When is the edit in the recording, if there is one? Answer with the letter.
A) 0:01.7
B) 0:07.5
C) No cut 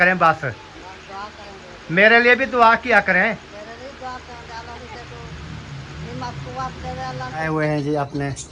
B